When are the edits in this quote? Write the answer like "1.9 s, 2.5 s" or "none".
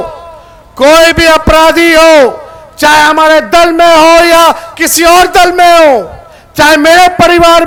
none